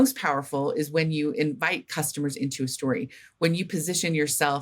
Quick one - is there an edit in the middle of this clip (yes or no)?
no